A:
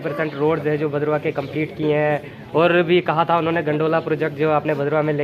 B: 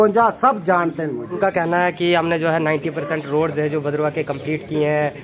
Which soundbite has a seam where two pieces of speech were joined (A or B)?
B